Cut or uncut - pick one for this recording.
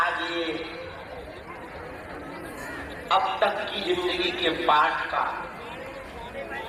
uncut